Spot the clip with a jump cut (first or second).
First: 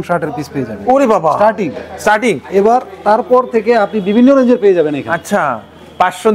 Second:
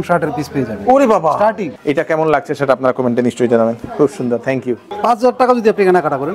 second